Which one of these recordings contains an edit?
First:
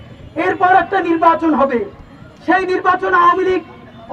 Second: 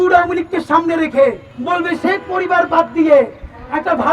second; 1 cut; at 1.5 s

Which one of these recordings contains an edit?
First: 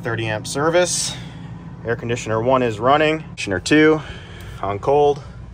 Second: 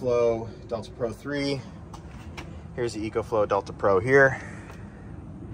first; 1 cut; at 3.4 s

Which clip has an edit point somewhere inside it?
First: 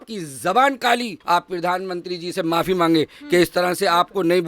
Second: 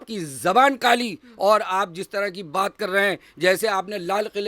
first; 1 cut; at 1.2 s

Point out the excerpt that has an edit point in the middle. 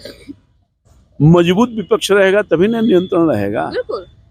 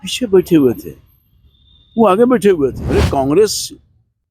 second; 1 cut; at 2.8 s

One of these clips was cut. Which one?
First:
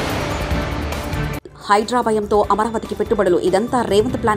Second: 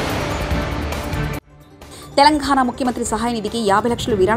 second; 1 cut; at 1.4 s

